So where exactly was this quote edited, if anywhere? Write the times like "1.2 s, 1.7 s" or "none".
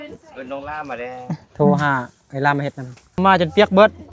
3.2 s

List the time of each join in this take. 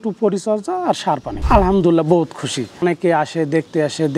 1.4 s, 2.8 s

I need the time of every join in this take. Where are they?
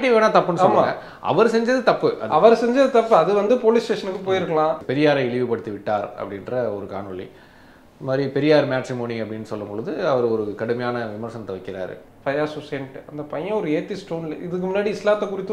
4.8 s, 12.1 s

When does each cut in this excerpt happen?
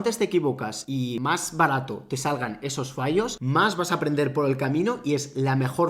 1.0 s, 3.4 s

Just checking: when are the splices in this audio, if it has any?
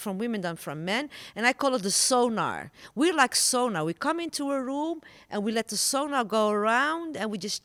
none

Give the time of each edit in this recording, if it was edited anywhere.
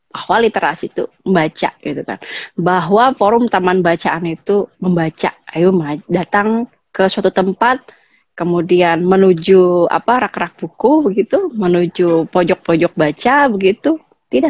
none

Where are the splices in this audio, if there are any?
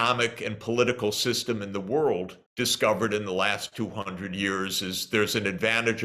2.4 s

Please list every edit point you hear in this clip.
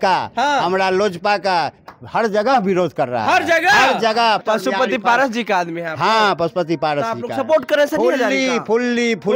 4.4 s

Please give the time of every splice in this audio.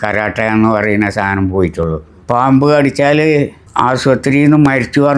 2.2 s, 3.6 s

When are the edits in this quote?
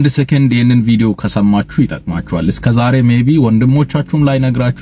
none

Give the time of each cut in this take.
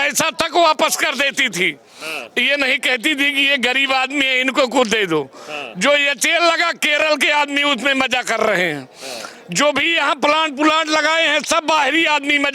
none

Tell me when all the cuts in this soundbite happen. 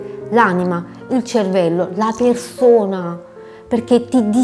none

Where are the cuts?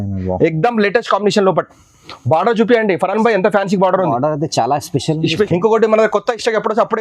5.5 s

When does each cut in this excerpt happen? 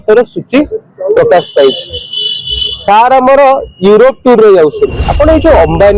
5.0 s

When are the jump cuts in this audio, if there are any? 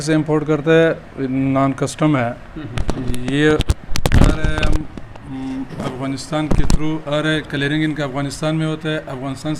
none

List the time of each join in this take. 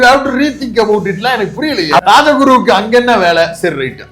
2.0 s

